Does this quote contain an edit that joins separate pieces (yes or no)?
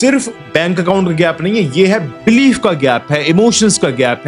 yes